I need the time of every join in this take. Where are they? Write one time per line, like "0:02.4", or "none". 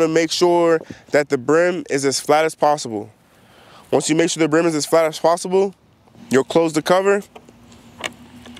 none